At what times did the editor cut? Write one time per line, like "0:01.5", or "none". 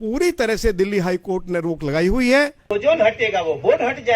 0:02.7

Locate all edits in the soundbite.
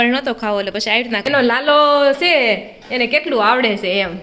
0:01.3

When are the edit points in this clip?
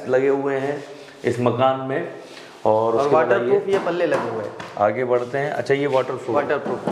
none

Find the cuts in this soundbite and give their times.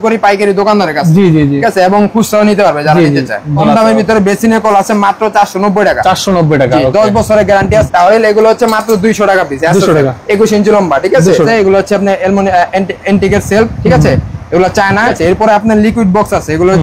0:03.6
0:07.9
0:11.5
0:15.1

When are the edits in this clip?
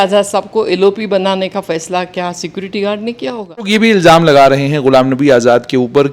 0:03.7

